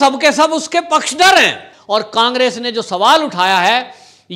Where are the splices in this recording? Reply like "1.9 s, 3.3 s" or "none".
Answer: 1.7 s